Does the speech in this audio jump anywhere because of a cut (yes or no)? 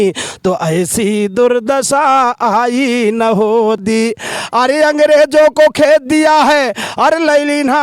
yes